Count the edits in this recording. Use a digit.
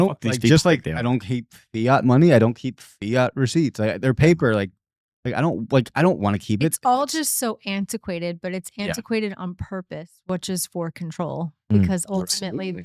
0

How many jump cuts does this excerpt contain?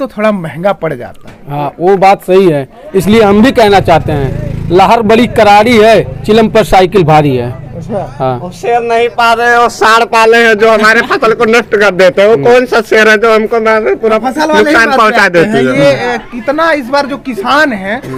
0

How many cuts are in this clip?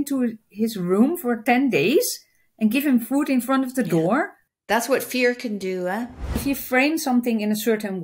2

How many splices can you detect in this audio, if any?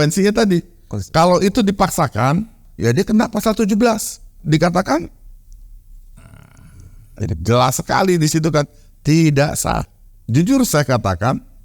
2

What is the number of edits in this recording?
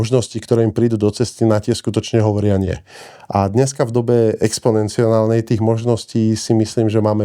0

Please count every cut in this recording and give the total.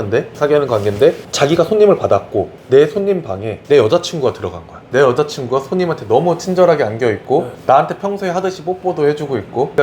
1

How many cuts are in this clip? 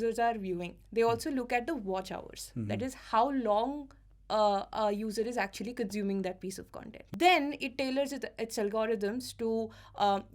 1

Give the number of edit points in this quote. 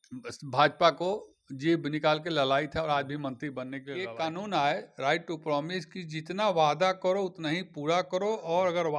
1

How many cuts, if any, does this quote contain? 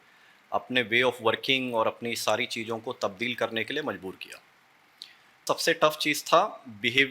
1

